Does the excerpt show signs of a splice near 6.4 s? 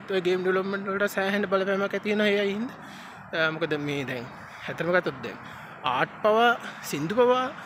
no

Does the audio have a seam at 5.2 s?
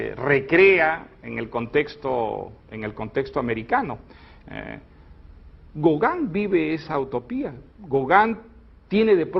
yes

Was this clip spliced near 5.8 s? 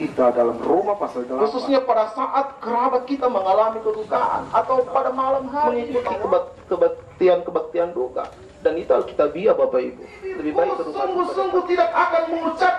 yes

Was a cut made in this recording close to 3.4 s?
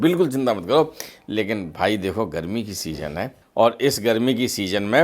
yes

